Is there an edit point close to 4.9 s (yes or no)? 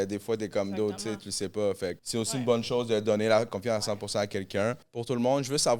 yes